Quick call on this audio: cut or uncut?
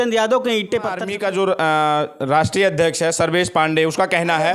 cut